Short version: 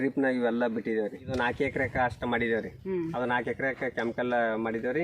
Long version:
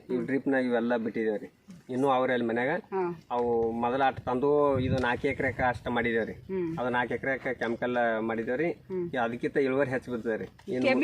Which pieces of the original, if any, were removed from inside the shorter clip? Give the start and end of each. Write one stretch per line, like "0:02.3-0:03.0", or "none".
0:01.6-0:04.9

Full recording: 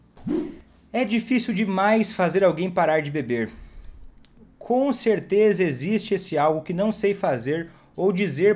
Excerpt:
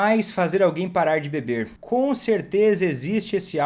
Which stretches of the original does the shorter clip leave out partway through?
0:03.6-0:04.5

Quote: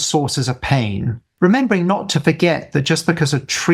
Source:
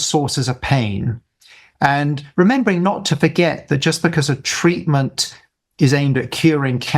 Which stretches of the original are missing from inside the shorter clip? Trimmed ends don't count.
0:01.3-0:02.2

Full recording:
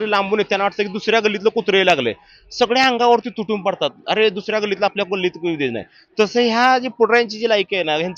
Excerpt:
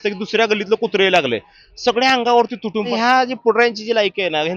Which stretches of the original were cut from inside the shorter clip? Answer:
0:03.7-0:06.5

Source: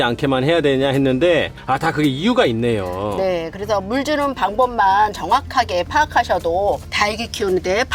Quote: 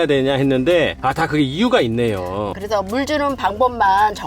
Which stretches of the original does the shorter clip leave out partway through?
0:01.5-0:01.6
0:03.1-0:03.5

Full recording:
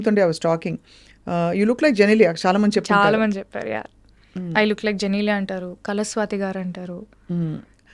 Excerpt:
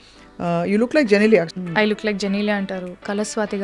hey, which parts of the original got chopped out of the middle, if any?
0:02.4-0:04.3

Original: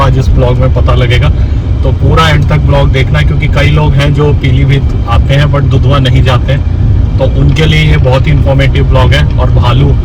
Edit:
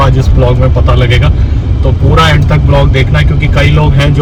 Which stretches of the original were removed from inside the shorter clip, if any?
none

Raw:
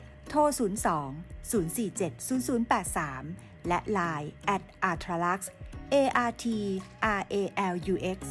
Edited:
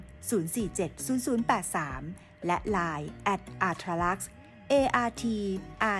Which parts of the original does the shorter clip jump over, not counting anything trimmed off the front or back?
none

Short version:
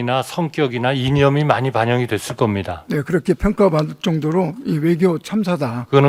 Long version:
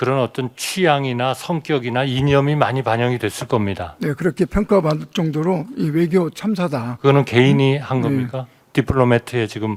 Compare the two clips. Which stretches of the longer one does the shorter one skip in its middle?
none

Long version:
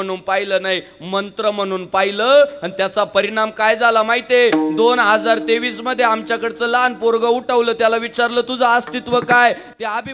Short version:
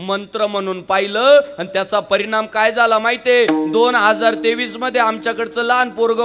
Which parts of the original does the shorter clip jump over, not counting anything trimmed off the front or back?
none

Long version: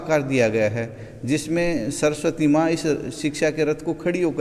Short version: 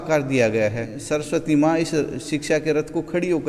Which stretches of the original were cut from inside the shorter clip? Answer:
0:01.0-0:01.9

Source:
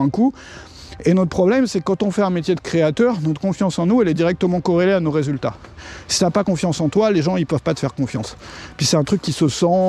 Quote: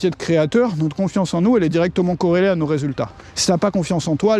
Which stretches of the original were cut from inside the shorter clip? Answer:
0:05.7-0:06.0

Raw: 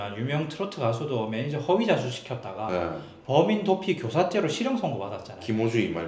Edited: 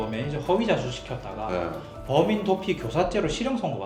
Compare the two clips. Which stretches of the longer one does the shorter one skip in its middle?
none

